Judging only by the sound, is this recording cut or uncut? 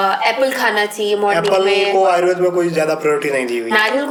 uncut